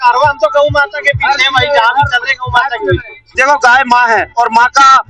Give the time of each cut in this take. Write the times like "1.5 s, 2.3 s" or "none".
3.3 s